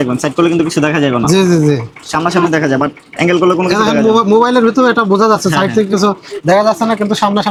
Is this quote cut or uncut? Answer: uncut